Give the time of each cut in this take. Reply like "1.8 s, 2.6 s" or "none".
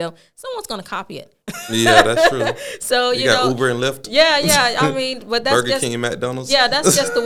none

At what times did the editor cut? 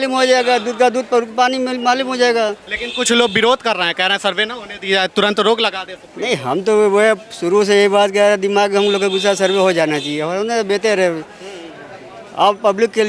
none

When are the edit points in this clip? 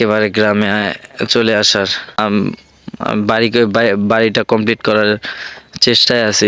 2.2 s

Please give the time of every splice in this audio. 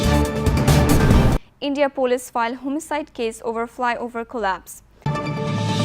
1.0 s

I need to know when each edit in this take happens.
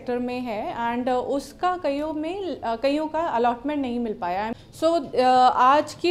4.5 s

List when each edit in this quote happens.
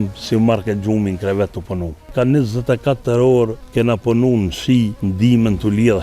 2.1 s, 3.6 s, 5.0 s

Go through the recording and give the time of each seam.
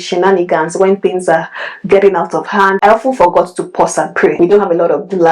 4.3 s

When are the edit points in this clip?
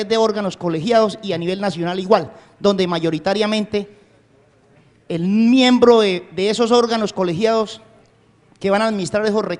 2.9 s

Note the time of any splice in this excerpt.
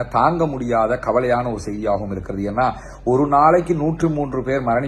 none

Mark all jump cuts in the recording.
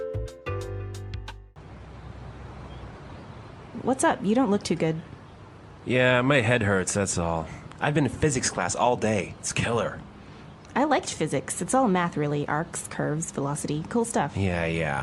1.5 s

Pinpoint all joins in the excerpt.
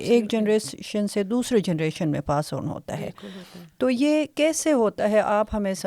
none

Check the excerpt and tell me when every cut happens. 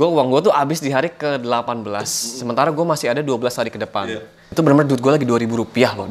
4.5 s

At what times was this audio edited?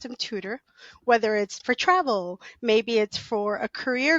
1.6 s

